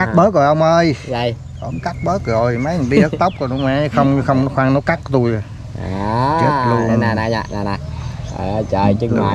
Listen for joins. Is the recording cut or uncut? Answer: uncut